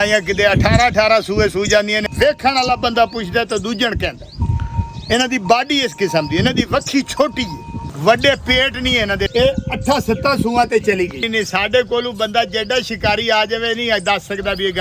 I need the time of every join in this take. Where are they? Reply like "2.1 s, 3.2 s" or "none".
2.0 s, 7.8 s, 9.3 s, 11.2 s